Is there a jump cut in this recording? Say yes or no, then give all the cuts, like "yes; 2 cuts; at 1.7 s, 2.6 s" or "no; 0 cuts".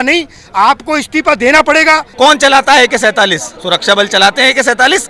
yes; 2 cuts; at 2.1 s, 3.5 s